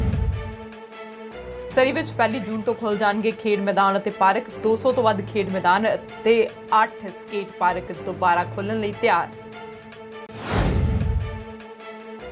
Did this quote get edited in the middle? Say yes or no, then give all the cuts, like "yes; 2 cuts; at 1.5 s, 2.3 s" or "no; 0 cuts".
yes; 1 cut; at 1.7 s